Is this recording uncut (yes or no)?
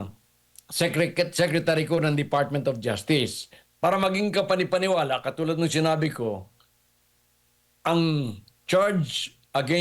no